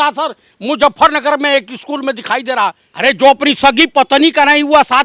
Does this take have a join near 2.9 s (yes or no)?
yes